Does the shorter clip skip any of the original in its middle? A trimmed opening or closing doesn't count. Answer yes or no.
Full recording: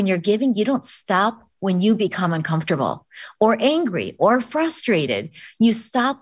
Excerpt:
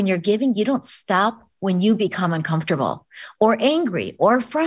no